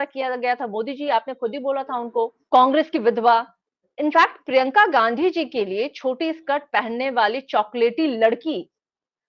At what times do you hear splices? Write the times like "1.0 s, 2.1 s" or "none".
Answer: 2.4 s

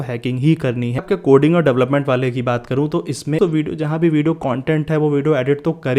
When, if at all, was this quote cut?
1.0 s, 3.4 s

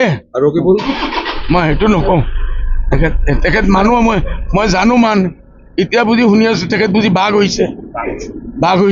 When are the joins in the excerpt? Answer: none

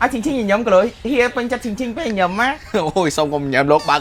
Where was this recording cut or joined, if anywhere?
none

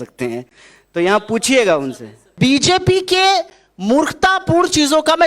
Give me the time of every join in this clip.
2.3 s

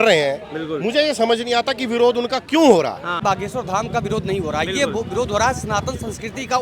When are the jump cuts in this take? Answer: 3.2 s

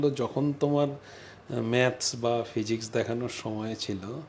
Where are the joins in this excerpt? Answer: none

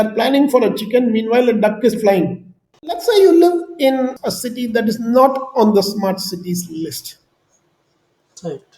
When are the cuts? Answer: 3.0 s, 4.2 s

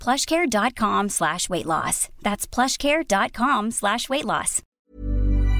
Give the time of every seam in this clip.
4.6 s

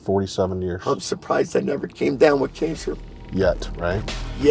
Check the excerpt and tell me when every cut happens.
3.1 s

